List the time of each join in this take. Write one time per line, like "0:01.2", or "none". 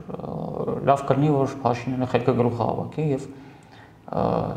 none

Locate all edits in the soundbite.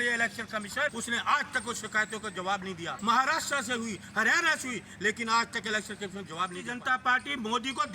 0:00.9
0:02.9
0:06.7

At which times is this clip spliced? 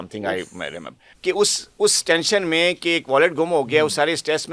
0:01.1

